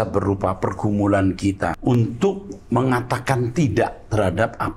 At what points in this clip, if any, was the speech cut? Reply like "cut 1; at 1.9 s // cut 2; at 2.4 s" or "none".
cut 1; at 1.8 s